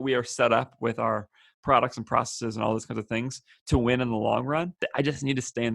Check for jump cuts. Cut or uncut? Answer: cut